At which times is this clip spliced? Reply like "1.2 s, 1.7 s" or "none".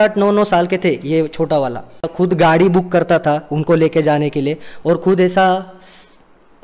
2.1 s